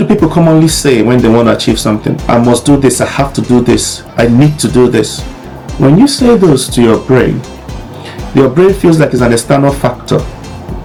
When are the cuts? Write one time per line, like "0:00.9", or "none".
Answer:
none